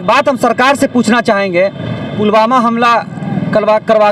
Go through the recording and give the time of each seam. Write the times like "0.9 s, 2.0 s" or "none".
2.1 s